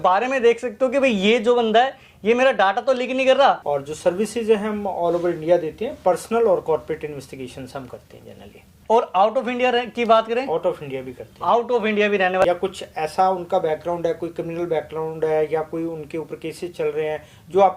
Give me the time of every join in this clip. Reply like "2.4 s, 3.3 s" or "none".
3.6 s, 8.8 s, 12.4 s